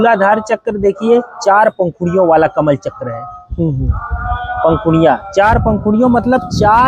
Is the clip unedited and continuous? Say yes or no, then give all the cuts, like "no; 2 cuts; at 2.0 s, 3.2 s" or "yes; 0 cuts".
yes; 0 cuts